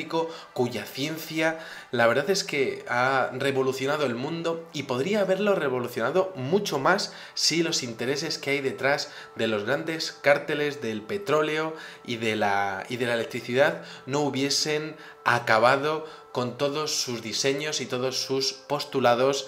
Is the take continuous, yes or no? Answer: no